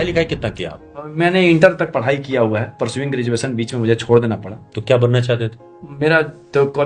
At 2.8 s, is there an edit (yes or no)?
no